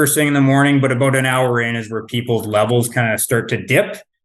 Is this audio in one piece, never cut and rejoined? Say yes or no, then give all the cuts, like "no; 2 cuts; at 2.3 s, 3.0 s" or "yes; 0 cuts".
yes; 0 cuts